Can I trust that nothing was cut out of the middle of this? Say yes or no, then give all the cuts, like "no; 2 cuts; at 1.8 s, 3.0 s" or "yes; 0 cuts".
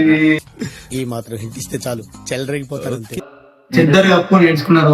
no; 1 cut; at 3.2 s